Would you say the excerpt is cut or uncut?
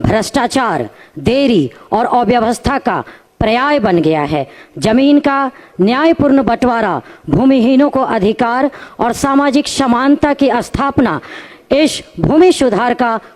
uncut